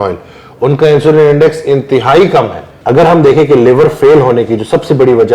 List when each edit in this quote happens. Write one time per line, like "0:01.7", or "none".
0:02.7